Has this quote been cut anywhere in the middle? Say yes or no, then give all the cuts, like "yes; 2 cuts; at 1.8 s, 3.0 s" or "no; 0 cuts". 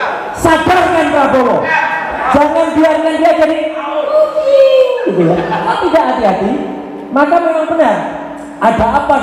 yes; 2 cuts; at 1.7 s, 5.7 s